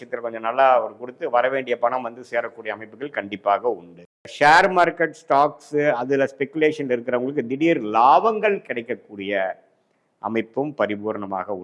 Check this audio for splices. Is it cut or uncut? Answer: cut